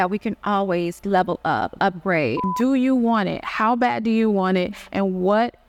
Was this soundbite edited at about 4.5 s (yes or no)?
no